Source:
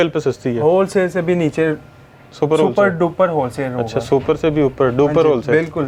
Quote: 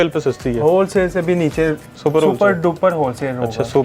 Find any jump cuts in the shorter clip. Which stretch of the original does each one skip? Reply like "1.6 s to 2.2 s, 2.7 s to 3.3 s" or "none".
1.9 s to 2.2 s